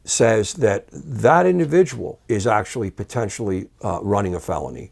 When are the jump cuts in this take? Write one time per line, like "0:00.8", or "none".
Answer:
0:02.1
0:03.7